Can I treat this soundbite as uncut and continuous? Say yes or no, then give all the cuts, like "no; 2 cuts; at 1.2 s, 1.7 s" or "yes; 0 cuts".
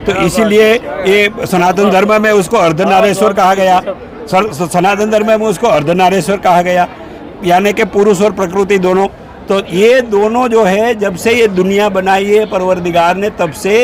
yes; 0 cuts